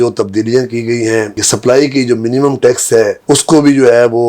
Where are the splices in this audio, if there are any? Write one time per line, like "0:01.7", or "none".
0:01.4